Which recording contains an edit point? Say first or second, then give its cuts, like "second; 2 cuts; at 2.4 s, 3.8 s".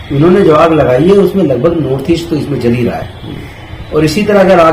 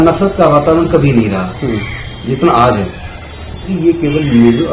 second; 1 cut; at 3.7 s